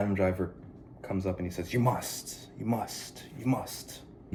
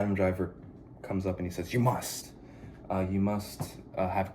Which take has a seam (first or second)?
second